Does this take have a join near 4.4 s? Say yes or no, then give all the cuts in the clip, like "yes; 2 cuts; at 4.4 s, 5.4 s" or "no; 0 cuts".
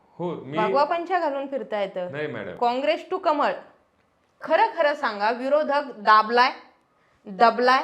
yes; 1 cut; at 4.4 s